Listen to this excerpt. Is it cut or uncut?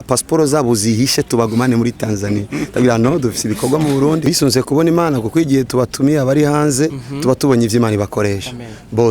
cut